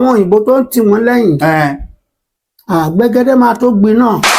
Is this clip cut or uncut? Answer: uncut